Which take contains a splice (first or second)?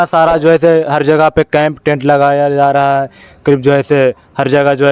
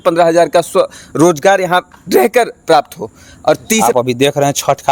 second